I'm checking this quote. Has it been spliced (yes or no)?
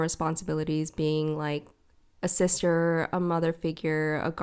no